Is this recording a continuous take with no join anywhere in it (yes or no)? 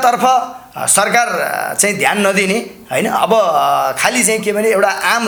yes